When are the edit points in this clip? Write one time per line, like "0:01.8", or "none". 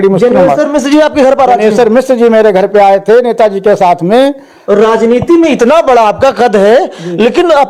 none